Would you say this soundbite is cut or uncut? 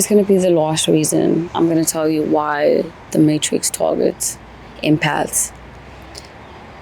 cut